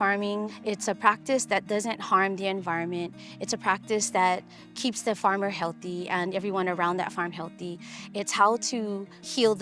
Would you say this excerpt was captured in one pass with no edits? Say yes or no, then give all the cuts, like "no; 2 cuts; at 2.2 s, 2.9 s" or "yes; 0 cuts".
yes; 0 cuts